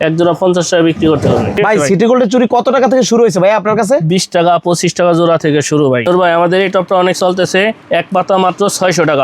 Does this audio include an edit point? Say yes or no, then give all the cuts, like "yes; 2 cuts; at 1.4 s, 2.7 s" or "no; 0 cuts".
yes; 2 cuts; at 1.6 s, 6.1 s